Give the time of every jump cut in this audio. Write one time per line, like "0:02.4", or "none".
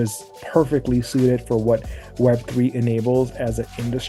none